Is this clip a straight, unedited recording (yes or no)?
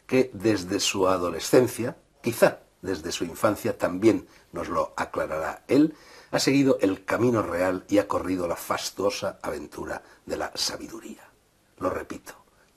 yes